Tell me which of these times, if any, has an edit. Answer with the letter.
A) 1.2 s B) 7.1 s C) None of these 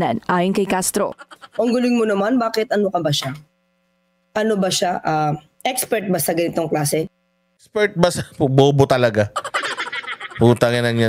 A